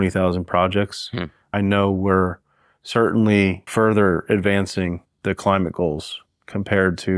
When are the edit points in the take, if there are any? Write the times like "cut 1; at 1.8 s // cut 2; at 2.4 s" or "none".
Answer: cut 1; at 1.4 s // cut 2; at 3.7 s // cut 3; at 5.1 s